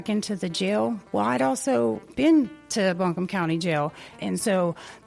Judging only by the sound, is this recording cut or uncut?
cut